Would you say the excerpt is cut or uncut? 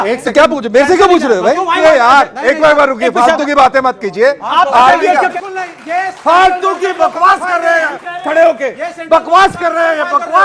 cut